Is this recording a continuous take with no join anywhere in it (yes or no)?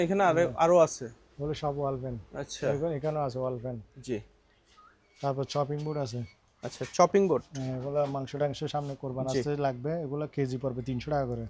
yes